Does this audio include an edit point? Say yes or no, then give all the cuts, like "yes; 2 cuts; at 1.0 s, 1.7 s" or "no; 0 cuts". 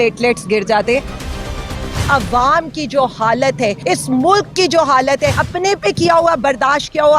yes; 3 cuts; at 1.6 s, 3.8 s, 5.4 s